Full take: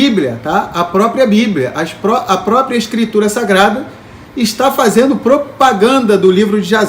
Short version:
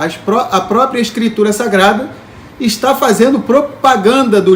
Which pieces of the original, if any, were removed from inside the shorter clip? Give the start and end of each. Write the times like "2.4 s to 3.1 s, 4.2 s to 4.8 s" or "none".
none